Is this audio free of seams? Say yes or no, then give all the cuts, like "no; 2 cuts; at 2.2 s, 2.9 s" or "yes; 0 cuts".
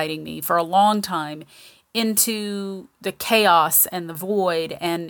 yes; 0 cuts